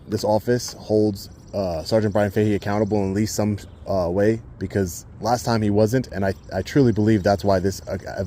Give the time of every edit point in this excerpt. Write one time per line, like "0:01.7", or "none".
none